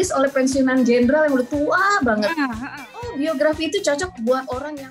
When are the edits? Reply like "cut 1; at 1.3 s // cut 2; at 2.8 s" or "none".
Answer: cut 1; at 3.1 s

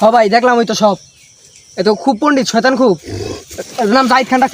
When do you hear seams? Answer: none

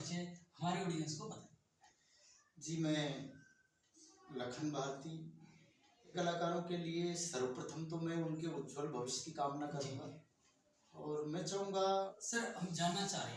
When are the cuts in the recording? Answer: cut 1; at 6.1 s // cut 2; at 12.1 s

